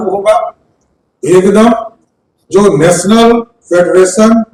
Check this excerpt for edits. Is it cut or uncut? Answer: uncut